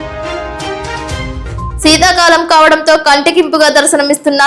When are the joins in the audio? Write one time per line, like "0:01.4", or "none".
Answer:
0:00.9